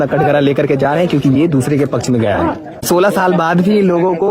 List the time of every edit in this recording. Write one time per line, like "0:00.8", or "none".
0:02.8